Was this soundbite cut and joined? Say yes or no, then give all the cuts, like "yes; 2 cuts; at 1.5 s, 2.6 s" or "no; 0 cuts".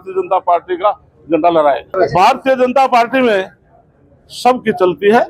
yes; 1 cut; at 1.9 s